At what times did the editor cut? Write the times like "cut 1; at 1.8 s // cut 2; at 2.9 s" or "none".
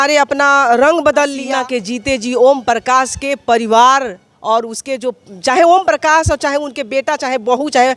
cut 1; at 1.4 s